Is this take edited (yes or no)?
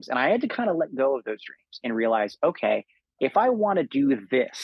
no